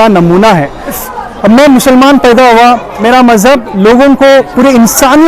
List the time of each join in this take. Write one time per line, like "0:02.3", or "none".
0:01.0
0:03.0

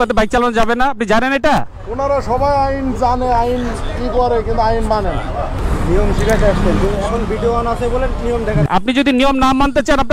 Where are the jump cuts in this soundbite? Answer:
0:05.5
0:08.7

